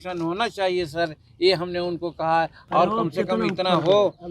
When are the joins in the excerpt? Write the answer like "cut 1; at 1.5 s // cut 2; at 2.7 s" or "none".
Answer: cut 1; at 2.6 s